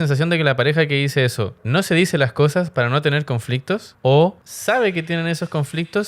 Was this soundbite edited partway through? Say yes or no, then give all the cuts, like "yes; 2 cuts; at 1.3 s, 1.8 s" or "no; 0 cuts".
yes; 3 cuts; at 1.6 s, 3.9 s, 4.5 s